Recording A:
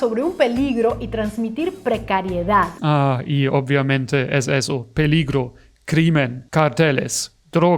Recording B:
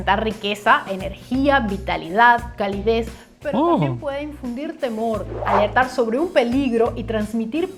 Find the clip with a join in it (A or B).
A